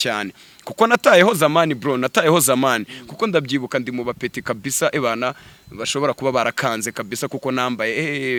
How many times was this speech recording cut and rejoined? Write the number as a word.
zero